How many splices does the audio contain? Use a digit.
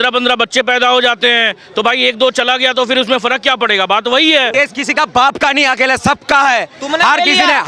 1